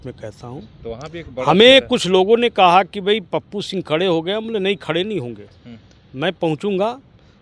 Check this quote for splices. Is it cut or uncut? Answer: uncut